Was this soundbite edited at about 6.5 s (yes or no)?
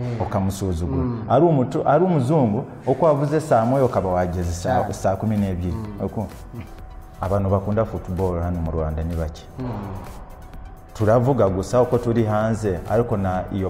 yes